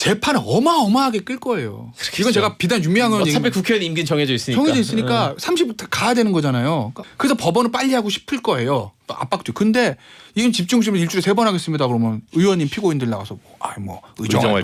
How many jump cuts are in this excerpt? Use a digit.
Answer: 1